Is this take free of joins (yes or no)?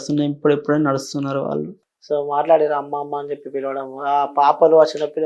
yes